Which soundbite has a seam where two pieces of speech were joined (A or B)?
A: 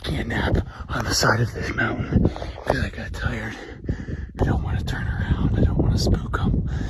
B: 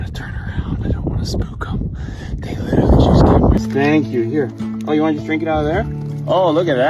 B